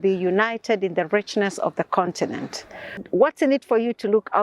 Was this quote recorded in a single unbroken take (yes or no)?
no